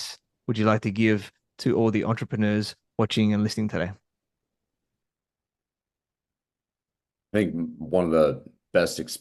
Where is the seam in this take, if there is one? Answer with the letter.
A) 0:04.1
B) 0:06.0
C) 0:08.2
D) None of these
D